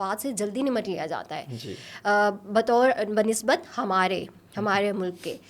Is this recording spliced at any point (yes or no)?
no